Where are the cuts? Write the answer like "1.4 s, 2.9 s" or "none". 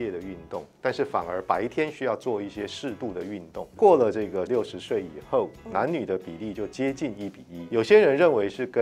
3.8 s, 4.5 s, 7.5 s